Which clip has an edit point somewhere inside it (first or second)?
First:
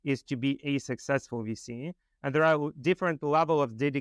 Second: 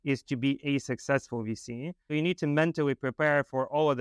second